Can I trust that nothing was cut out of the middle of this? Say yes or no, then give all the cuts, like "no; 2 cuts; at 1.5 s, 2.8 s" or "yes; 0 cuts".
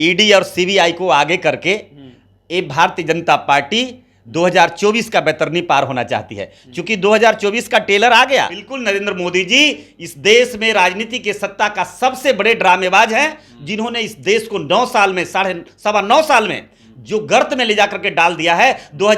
no; 1 cut; at 8.7 s